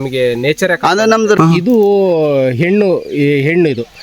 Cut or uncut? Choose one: cut